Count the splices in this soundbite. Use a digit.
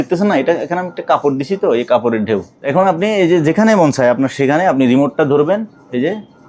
1